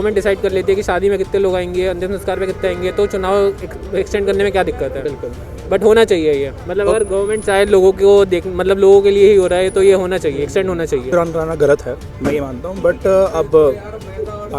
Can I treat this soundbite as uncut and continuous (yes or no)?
no